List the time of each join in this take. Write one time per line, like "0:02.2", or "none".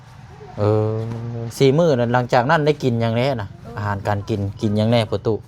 none